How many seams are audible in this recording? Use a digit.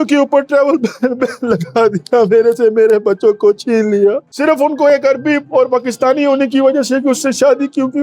1